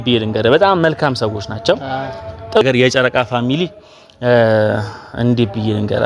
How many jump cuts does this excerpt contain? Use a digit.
1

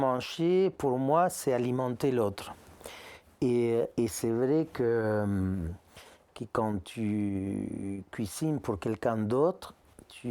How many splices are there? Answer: 0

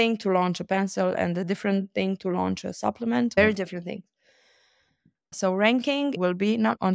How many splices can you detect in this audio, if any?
3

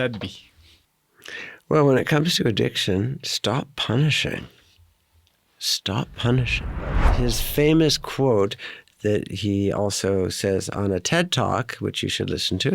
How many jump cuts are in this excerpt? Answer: 1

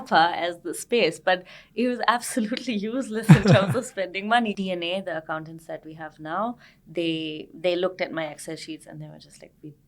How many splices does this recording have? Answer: 1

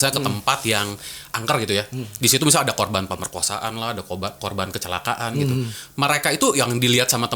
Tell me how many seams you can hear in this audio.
0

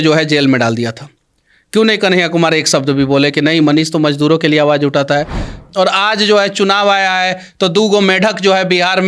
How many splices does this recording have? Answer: 1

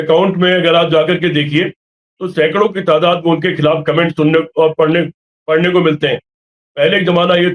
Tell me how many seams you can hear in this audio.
0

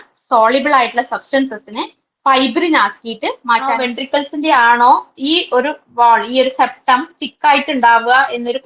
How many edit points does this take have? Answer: 1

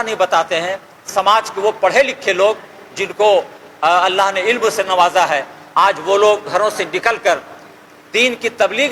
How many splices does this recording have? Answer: 0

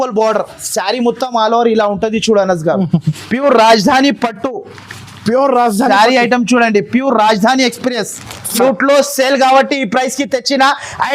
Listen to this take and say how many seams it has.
2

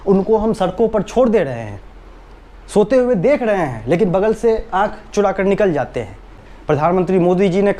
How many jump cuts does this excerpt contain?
1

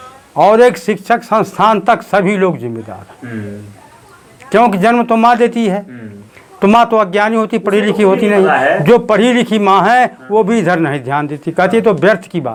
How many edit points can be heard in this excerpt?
0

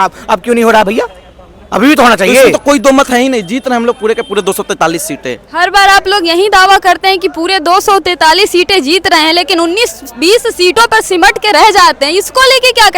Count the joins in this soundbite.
1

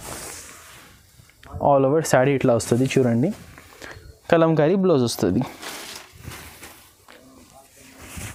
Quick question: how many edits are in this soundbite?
0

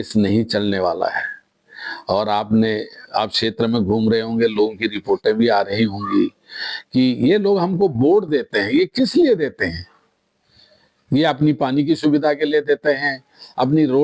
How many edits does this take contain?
0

